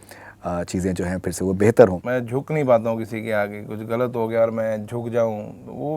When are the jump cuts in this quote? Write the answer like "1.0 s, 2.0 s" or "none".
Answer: 2.0 s